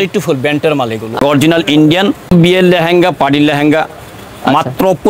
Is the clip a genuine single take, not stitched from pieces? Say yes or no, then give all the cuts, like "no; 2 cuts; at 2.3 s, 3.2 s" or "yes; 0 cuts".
no; 2 cuts; at 1.2 s, 2.3 s